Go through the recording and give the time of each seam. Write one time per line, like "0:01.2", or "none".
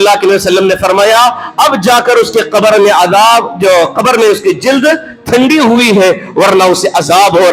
none

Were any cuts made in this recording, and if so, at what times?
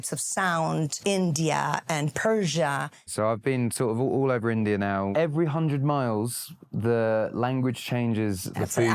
0:01.0
0:03.1
0:05.1

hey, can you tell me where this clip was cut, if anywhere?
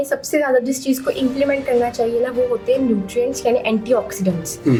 none

